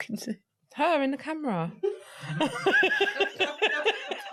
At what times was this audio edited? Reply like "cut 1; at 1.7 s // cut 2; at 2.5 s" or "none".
none